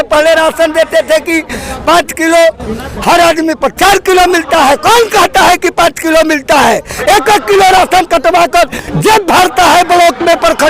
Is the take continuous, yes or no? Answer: yes